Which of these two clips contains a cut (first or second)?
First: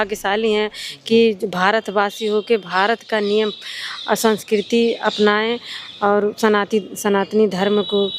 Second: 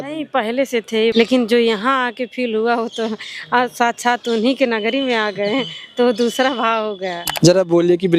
second